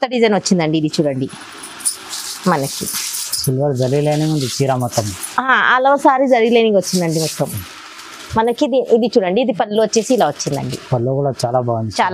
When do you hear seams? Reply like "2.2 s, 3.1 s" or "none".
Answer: none